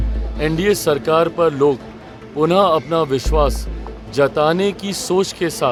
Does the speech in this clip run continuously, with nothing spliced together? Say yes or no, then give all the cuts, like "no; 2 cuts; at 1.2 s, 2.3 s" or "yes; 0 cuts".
yes; 0 cuts